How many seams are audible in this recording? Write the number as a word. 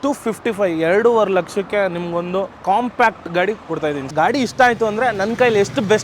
two